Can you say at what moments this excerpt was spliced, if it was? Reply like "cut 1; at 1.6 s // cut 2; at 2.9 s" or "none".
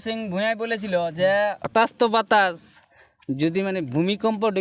cut 1; at 1.7 s